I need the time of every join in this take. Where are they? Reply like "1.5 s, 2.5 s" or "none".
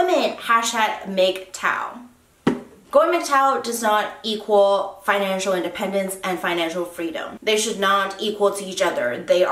2.7 s